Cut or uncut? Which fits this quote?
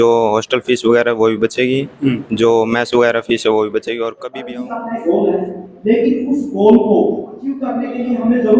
cut